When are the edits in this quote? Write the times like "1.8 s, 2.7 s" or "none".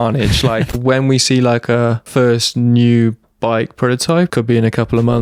0.7 s, 2.0 s, 4.3 s